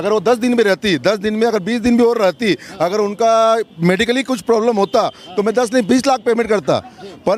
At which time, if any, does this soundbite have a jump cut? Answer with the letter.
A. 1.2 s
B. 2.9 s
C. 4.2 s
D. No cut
D